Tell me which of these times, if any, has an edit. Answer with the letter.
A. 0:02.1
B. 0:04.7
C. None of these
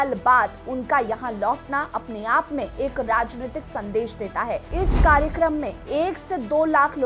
B